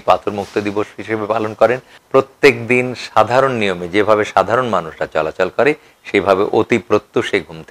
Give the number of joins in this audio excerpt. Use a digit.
1